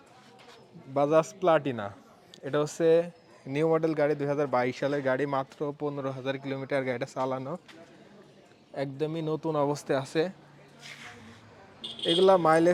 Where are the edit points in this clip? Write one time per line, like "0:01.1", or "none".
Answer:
none

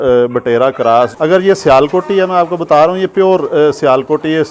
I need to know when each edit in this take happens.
0:01.1

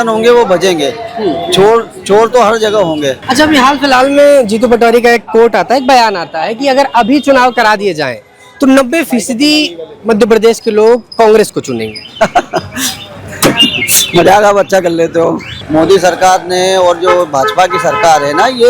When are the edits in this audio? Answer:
0:03.2
0:15.5

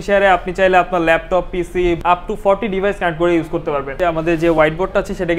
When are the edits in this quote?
0:02.0
0:03.9

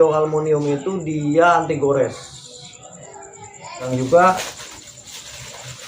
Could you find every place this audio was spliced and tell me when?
0:03.9

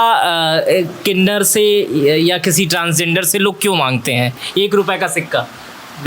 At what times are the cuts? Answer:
none

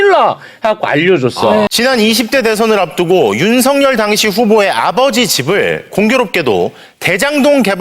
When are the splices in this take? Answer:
0:01.7

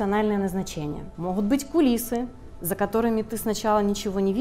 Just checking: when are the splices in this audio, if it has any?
0:01.1

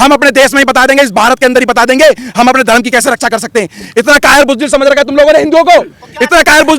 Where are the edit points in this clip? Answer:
none

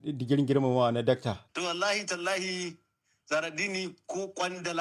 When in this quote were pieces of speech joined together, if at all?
0:01.4

